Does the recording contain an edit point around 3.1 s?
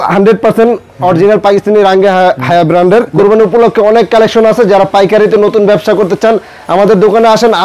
yes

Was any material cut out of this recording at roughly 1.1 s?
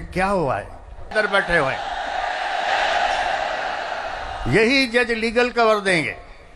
yes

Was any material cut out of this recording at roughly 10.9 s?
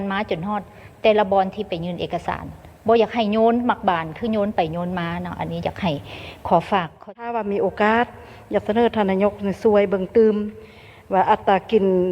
no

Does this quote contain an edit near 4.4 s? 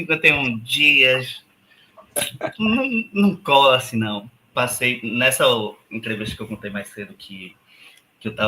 yes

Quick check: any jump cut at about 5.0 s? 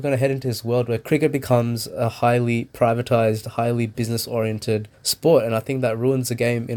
yes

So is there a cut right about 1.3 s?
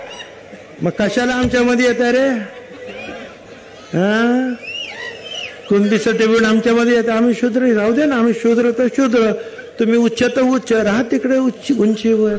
no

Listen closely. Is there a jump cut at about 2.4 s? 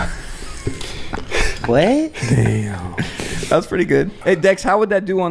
no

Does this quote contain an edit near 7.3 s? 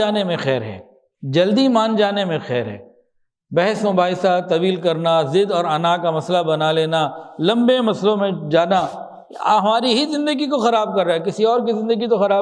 no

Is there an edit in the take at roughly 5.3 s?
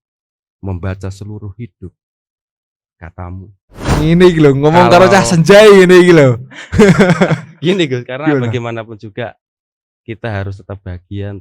no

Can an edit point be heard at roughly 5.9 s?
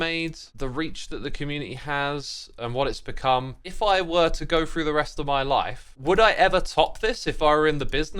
yes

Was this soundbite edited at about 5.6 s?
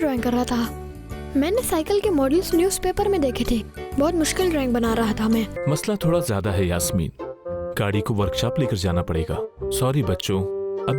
yes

